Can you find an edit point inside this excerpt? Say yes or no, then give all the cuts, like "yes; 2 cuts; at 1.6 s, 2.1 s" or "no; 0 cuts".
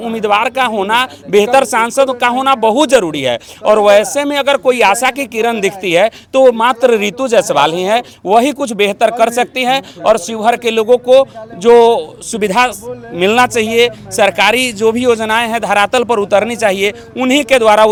no; 0 cuts